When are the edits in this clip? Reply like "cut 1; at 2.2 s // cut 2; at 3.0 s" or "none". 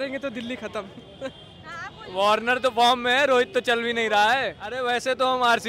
cut 1; at 4.8 s